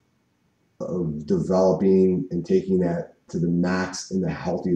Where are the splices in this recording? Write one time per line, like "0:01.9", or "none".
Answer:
0:03.3